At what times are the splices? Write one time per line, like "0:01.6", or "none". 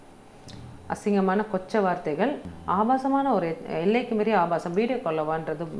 0:02.5